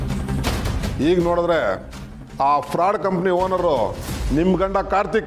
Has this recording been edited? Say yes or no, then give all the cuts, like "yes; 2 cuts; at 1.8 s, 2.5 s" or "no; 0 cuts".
yes; 1 cut; at 0.9 s